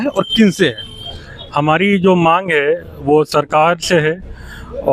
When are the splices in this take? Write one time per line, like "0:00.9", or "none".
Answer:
none